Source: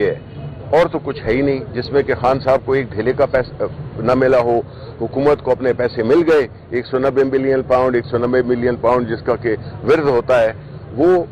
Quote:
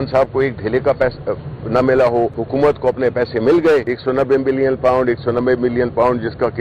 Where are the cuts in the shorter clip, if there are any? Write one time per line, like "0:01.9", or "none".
0:02.4
0:03.9

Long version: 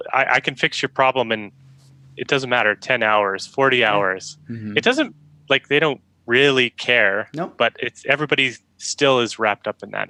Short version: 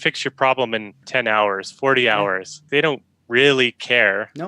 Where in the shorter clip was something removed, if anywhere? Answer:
0:01.0
0:02.7

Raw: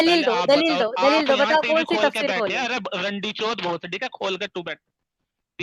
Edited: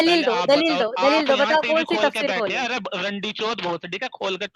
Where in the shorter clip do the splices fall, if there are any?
none

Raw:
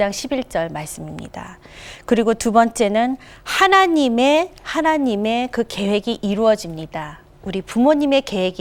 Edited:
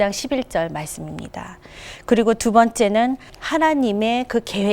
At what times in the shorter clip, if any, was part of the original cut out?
0:03.4

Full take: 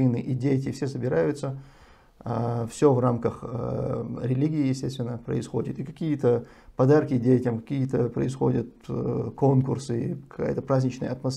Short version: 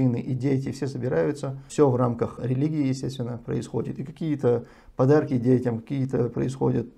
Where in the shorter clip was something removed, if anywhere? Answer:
0:01.6
0:02.4

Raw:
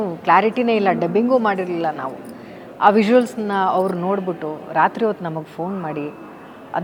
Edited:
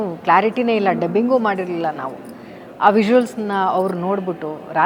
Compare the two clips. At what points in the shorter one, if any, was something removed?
none

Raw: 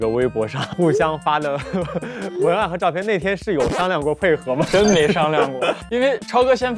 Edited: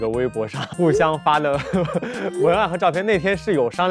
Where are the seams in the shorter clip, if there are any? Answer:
none

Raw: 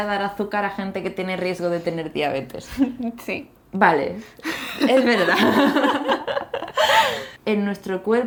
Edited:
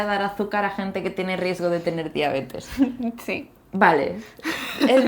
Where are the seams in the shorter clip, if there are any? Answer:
none

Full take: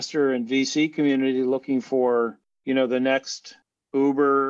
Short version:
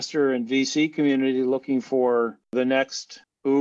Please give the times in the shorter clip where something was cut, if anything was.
0:02.7

